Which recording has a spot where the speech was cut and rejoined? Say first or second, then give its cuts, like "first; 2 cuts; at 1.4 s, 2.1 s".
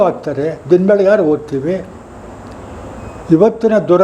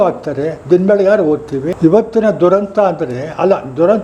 second; 1 cut; at 1.7 s